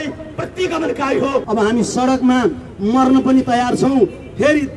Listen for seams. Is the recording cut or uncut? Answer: cut